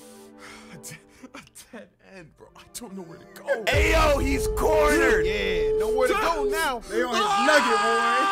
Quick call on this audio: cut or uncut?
uncut